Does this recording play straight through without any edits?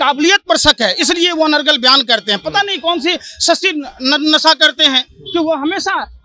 yes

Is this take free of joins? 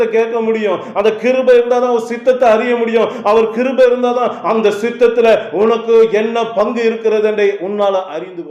yes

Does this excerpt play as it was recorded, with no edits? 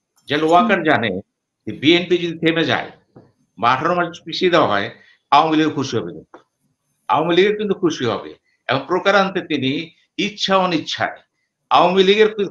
yes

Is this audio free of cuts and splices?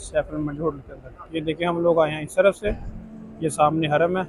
yes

